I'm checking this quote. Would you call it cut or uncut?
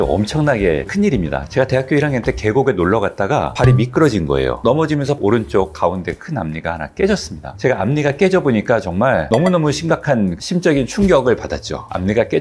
cut